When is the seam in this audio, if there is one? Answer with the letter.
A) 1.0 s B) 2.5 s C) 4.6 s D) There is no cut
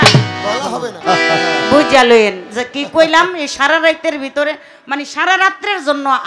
A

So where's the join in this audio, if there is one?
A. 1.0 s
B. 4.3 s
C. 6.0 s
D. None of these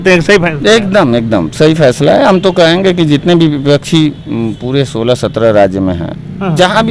D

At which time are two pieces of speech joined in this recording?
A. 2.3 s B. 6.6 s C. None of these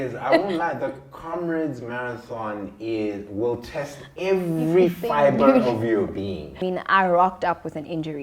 B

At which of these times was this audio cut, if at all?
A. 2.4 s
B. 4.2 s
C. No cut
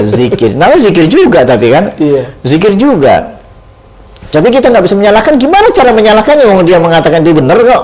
C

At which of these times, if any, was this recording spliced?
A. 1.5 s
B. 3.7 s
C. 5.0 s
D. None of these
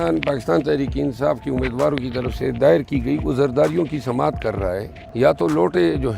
C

